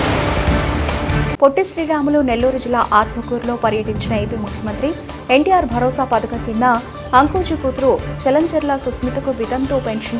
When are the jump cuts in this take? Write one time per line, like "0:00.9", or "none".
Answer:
0:01.1